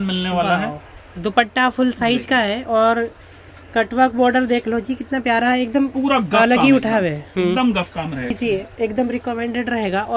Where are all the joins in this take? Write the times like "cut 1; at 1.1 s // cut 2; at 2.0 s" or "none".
cut 1; at 8.4 s

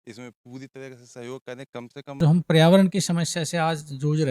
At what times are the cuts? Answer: cut 1; at 2.2 s

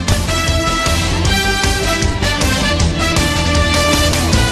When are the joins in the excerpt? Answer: none

